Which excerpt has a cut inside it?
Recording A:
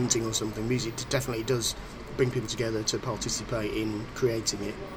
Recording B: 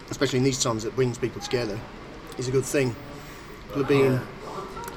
B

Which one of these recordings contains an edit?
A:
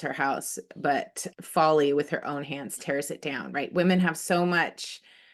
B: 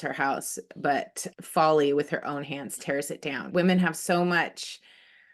B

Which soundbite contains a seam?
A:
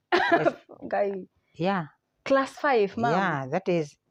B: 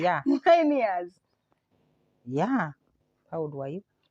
B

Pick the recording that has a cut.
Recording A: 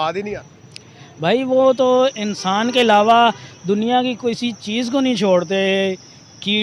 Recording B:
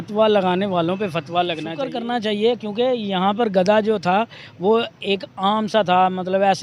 B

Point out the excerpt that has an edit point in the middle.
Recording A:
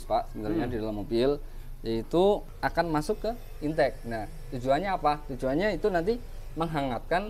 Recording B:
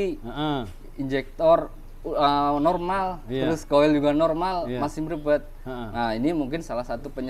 A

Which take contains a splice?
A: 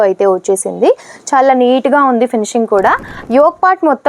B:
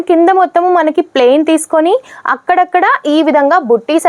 A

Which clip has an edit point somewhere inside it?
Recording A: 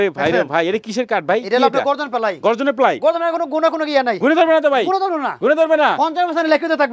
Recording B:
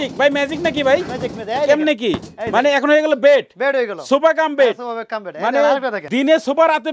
B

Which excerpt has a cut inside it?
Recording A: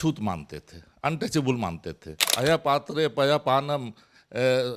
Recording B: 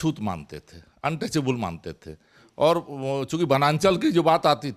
A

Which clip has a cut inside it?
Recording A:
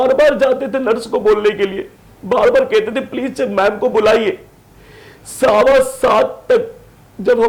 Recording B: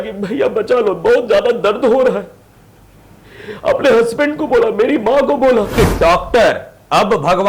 B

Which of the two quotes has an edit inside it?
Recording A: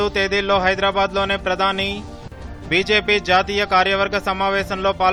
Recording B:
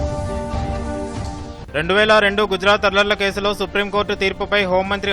B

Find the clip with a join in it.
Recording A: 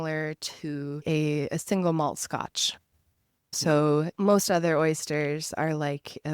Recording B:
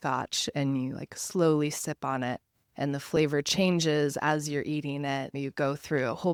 A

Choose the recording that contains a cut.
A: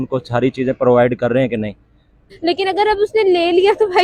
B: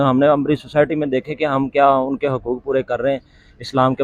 A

